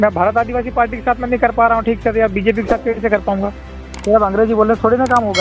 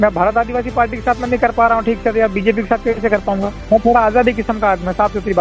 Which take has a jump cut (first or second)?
first